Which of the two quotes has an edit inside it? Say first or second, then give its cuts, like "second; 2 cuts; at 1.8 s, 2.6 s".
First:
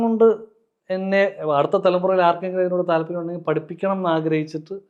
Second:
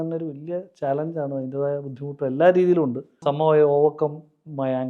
second; 1 cut; at 3.1 s